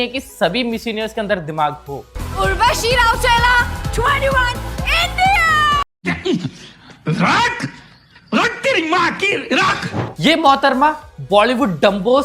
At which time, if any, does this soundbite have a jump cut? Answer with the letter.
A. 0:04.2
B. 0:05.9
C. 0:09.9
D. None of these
C